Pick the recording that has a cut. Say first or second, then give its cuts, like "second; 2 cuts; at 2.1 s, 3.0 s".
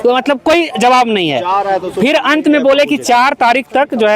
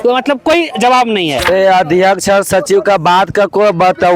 second; 1 cut; at 1.5 s